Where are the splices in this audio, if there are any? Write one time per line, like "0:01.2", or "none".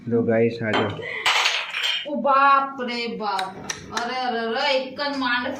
none